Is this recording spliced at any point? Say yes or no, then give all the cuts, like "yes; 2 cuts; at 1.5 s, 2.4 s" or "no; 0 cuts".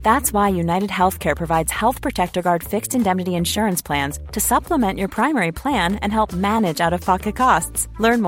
no; 0 cuts